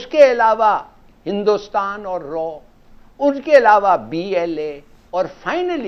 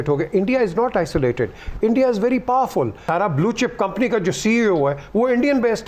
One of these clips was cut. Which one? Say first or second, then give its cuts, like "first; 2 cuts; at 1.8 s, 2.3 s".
second; 1 cut; at 3.0 s